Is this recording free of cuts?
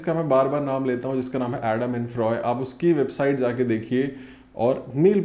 yes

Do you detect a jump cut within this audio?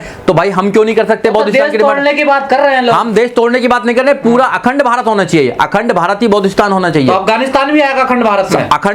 no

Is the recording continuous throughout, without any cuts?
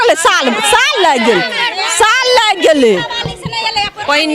yes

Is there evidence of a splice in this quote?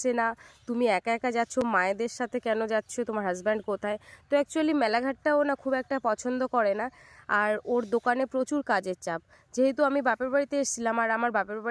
no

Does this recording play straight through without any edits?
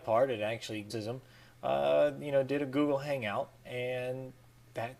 yes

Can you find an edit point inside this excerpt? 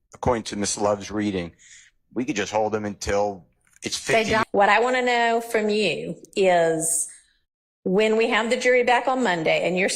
yes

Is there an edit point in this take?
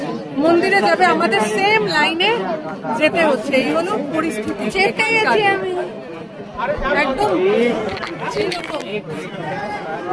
no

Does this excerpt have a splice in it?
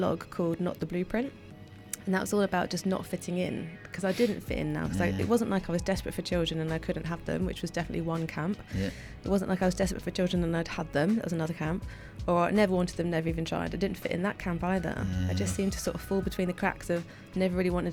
no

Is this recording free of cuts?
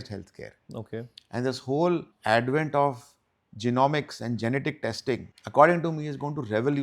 no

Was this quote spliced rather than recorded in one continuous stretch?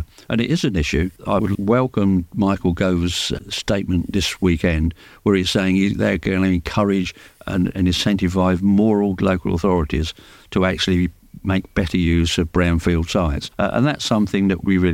yes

